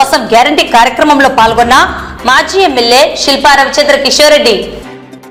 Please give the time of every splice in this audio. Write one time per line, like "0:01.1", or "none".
none